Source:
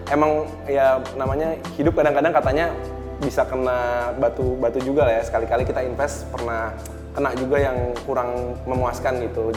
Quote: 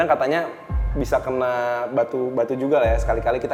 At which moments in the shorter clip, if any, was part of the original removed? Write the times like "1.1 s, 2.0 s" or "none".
none